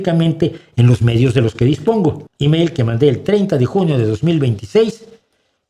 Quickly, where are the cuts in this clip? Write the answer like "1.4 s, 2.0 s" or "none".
2.3 s